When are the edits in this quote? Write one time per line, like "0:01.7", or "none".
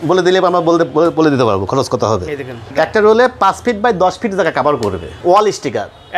0:02.7
0:05.2